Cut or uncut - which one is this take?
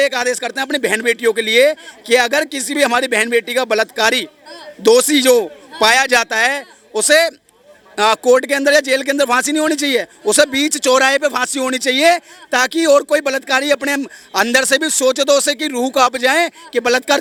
uncut